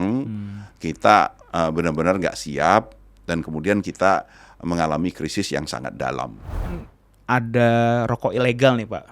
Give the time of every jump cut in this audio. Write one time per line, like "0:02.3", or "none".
0:06.9